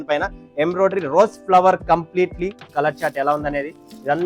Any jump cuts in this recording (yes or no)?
yes